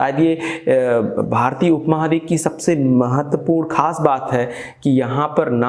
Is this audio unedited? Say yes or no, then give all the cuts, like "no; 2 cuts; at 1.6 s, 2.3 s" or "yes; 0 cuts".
yes; 0 cuts